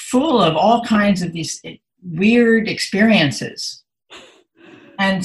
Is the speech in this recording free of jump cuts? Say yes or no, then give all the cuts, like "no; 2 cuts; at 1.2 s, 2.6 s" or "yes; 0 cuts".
yes; 0 cuts